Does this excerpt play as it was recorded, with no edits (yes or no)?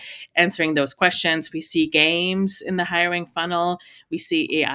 yes